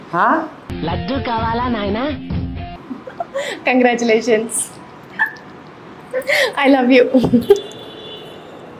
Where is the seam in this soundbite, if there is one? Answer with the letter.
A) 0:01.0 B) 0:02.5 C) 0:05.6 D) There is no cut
D